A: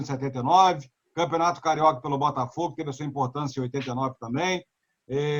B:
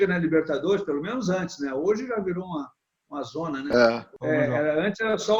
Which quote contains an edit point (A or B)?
B